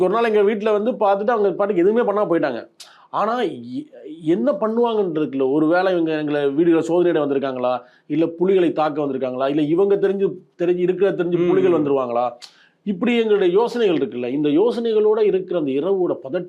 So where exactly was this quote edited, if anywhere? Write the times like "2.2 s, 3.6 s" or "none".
none